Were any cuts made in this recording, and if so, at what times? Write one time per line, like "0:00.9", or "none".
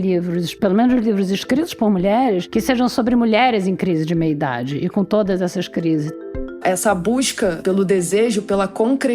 0:06.4
0:07.6